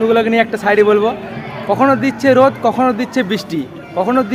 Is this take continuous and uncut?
yes; 0 cuts

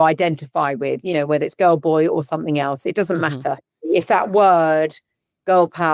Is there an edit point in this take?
yes; 1 cut; at 3.7 s

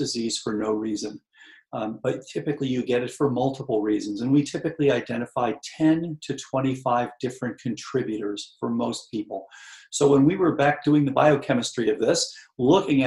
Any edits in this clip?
no; 0 cuts

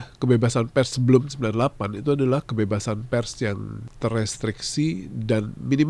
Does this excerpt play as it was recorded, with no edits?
no; 1 cut; at 3.9 s

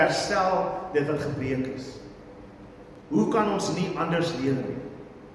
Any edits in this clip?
yes; 1 cut; at 2.9 s

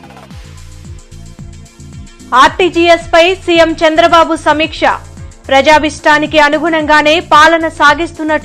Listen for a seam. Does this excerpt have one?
yes; 1 cut; at 2.1 s

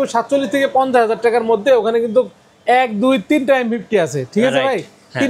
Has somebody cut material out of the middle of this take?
no; 0 cuts

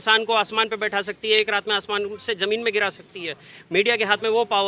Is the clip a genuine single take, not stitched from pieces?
yes; 0 cuts

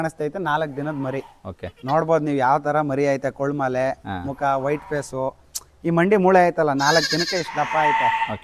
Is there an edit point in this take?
no; 0 cuts

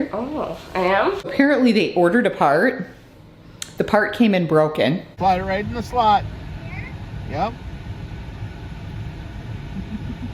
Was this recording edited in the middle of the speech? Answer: yes; 2 cuts; at 1.3 s, 5.1 s

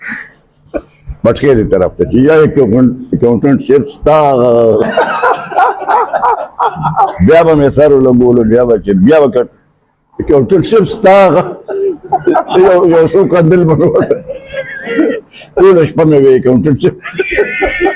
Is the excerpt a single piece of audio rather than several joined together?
yes; 0 cuts

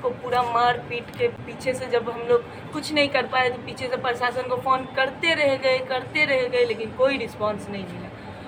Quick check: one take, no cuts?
yes; 0 cuts

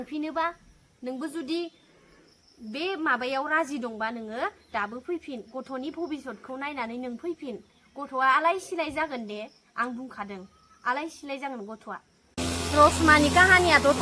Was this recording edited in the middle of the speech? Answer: no; 0 cuts

